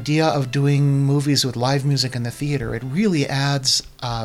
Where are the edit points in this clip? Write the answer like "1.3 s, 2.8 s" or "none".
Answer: none